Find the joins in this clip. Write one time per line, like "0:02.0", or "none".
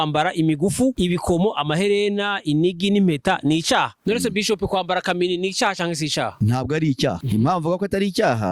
0:01.0
0:03.9
0:06.3
0:07.2